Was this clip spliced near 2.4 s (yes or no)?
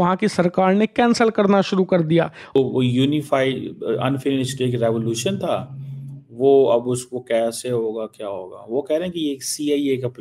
no